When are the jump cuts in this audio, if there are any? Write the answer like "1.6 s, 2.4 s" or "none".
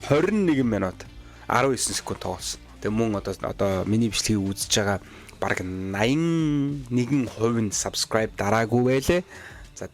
2.7 s